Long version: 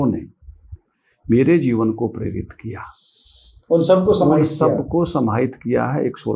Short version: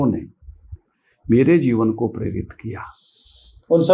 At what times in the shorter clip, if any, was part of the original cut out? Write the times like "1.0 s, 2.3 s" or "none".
none